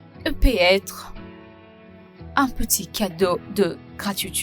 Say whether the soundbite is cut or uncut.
uncut